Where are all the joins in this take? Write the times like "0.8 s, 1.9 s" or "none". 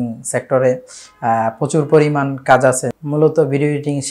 2.9 s